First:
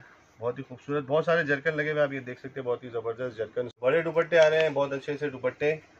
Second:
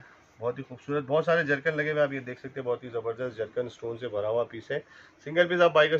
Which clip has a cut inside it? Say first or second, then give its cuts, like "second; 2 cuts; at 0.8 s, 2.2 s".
first; 1 cut; at 3.8 s